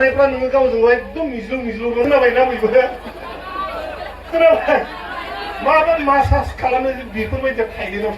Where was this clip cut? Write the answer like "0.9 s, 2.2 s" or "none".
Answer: 2.0 s